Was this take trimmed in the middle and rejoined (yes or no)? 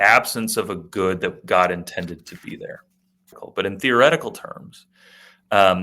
yes